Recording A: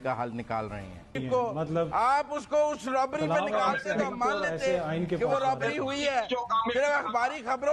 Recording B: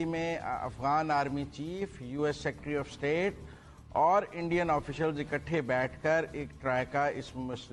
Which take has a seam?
A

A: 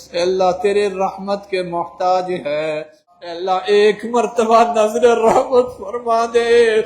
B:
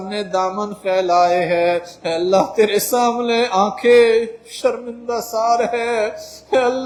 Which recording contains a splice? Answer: A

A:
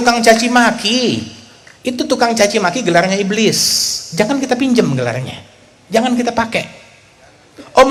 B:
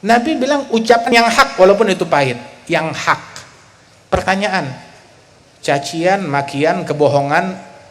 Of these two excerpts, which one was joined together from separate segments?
B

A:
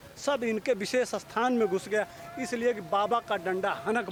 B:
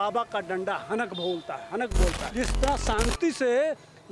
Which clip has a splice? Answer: B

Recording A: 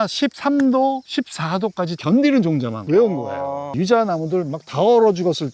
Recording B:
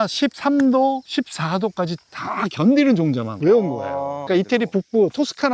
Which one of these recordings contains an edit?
A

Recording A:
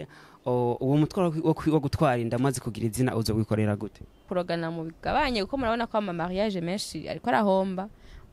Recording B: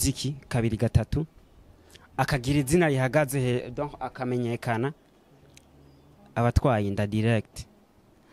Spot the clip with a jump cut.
A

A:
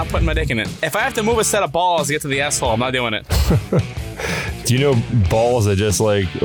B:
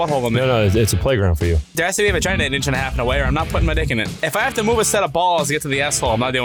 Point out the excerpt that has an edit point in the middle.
B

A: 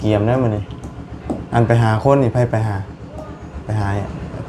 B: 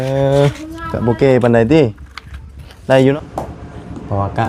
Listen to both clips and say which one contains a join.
B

